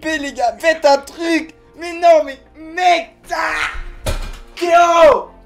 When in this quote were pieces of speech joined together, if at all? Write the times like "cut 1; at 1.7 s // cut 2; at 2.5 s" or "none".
none